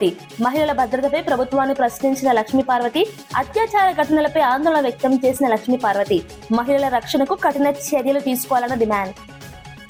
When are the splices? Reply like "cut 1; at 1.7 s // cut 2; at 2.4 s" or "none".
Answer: none